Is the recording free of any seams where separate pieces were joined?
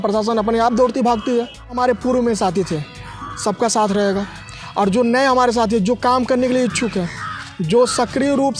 no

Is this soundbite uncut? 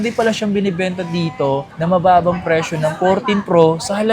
yes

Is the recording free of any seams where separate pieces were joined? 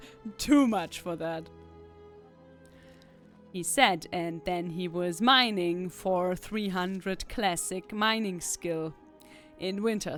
yes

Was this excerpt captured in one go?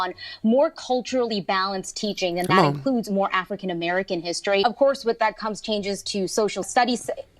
no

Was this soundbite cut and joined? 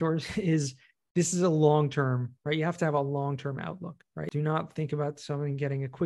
yes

